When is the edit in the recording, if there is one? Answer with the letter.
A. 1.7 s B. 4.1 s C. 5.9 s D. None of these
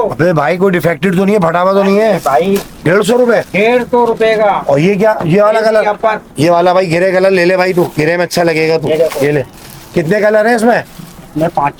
D